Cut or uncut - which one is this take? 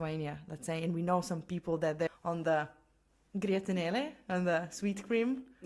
cut